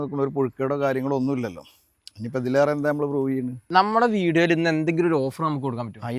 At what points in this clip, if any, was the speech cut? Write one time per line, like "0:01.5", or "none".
0:03.7